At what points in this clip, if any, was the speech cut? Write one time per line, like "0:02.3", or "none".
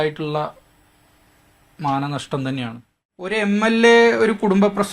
0:03.3